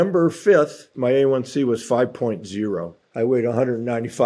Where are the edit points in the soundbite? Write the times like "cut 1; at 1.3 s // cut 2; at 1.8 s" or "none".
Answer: cut 1; at 3.0 s